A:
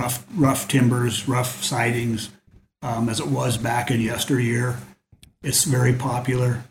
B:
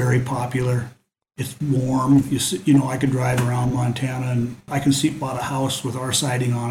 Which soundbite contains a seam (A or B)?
B